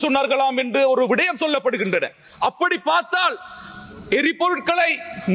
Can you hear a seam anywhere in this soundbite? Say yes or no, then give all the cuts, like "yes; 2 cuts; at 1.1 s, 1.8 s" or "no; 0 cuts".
no; 0 cuts